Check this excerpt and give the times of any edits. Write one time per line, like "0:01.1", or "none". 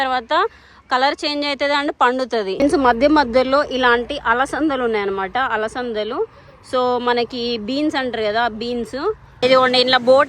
0:02.6
0:09.3